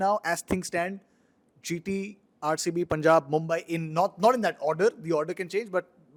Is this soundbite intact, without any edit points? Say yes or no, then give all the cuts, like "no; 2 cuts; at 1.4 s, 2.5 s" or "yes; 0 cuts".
yes; 0 cuts